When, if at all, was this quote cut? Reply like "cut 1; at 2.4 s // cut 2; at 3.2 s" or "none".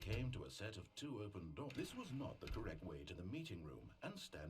cut 1; at 1.7 s